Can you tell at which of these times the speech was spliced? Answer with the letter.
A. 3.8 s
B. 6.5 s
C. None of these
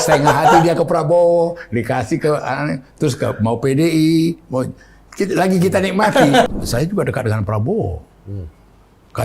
B